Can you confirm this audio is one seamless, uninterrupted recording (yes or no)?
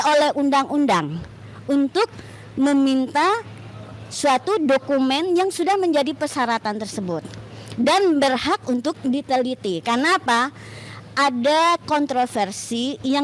yes